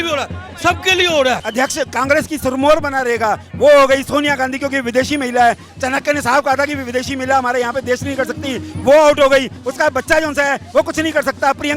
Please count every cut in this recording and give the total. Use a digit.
1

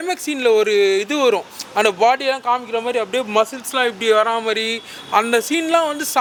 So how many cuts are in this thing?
0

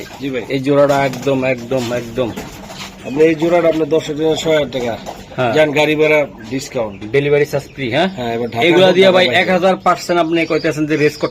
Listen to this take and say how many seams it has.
0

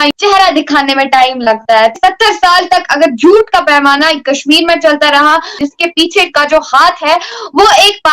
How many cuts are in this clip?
2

